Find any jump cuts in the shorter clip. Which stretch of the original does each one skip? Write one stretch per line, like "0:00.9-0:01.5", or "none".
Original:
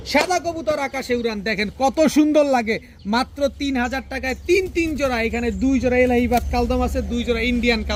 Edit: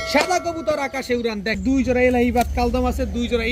0:01.6-0:05.5